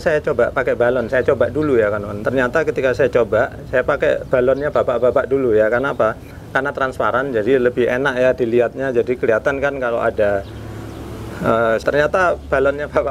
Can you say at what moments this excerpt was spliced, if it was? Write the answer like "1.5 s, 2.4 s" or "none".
11.8 s